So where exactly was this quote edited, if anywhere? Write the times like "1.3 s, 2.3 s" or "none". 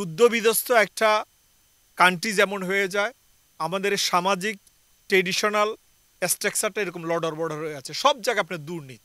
none